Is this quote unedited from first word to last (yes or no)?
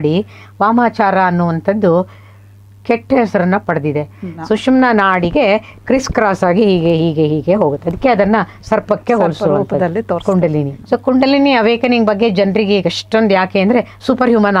no